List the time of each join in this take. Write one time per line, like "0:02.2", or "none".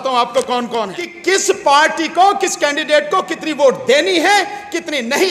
0:01.1